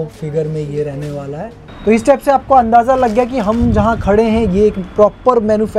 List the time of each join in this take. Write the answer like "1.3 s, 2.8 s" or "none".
1.6 s

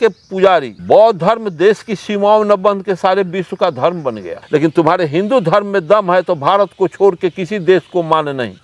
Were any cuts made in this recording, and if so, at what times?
none

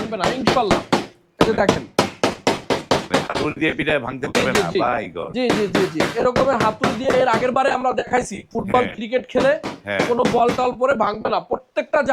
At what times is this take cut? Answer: none

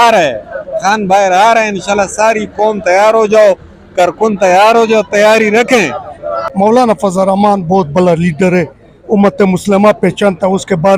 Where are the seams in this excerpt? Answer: 6.4 s

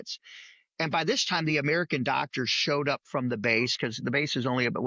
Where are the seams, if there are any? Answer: none

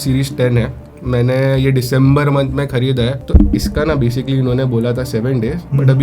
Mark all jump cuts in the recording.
3.2 s

